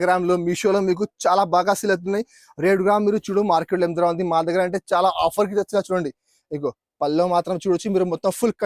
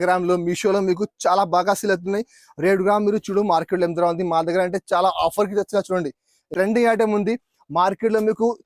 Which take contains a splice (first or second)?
second